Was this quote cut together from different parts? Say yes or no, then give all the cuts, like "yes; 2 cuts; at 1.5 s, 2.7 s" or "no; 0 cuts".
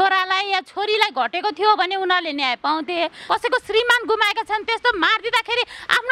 yes; 1 cut; at 3.2 s